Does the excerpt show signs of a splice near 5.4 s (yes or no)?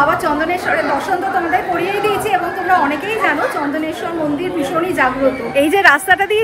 yes